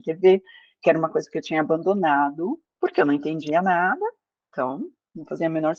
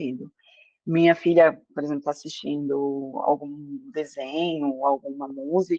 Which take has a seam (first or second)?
first